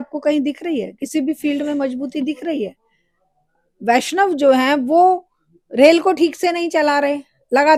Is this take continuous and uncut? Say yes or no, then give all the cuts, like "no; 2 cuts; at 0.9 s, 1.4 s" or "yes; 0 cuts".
yes; 0 cuts